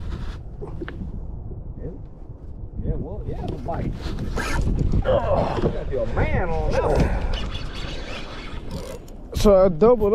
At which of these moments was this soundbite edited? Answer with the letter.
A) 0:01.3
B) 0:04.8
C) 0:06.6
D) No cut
D